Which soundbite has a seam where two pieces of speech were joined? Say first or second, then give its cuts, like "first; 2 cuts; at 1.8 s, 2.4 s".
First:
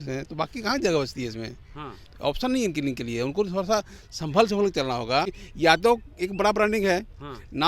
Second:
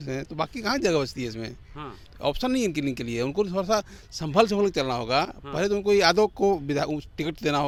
first; 1 cut; at 5.4 s